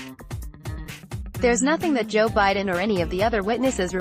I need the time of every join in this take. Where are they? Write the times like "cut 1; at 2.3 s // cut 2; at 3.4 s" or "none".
cut 1; at 1.6 s